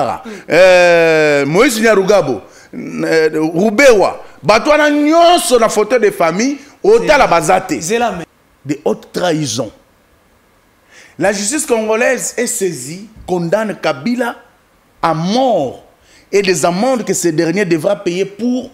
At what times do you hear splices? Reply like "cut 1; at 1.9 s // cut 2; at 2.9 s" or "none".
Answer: cut 1; at 8.3 s